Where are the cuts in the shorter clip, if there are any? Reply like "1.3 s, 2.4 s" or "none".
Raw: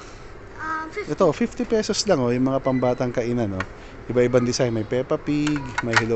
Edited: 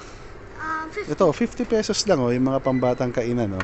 none